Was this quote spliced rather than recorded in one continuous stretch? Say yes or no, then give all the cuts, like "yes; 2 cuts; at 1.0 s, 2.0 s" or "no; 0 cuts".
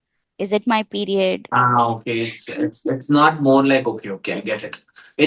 no; 0 cuts